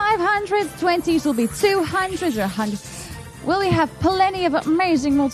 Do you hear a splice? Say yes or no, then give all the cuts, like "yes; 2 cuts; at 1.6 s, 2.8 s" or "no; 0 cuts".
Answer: no; 0 cuts